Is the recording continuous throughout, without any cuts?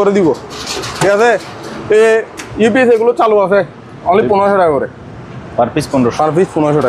yes; 0 cuts

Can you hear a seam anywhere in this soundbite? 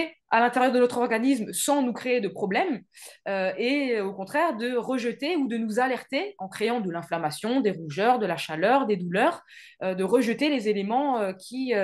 no; 0 cuts

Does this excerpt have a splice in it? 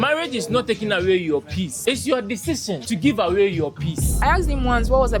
yes; 3 cuts; at 1.8 s, 2.8 s, 4.1 s

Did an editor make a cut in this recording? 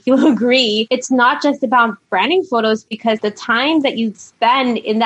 yes; 2 cuts; at 0.8 s, 3.1 s

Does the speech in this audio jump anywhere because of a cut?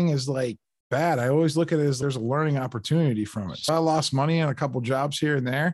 yes; 1 cut; at 3.6 s

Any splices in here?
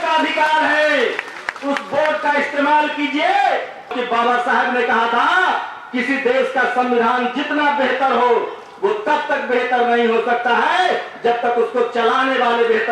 yes; 1 cut; at 3.9 s

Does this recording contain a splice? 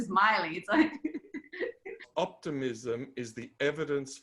yes; 1 cut; at 2.0 s

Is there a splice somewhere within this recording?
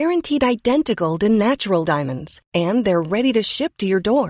no; 0 cuts

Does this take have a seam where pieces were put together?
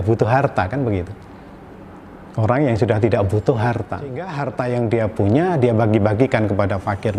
yes; 1 cut; at 4.3 s

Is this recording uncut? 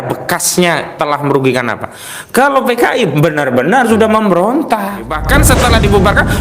no; 1 cut; at 5.2 s

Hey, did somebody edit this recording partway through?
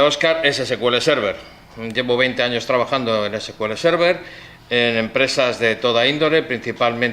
yes; 1 cut; at 3.5 s

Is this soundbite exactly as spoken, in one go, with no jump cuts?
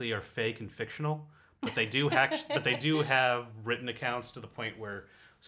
yes; 0 cuts

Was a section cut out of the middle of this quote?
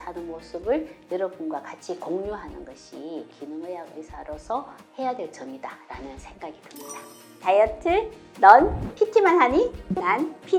no; 0 cuts

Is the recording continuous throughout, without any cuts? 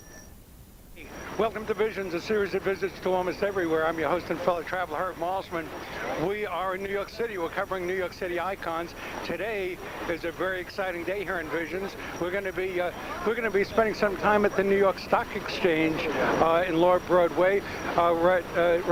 yes; 0 cuts

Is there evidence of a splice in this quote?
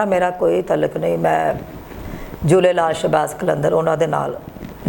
no; 0 cuts

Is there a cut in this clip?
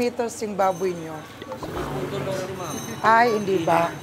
no; 0 cuts

